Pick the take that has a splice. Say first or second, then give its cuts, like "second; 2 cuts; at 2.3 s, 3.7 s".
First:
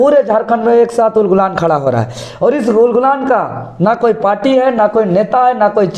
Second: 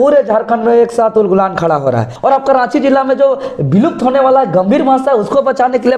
second; 1 cut; at 2.1 s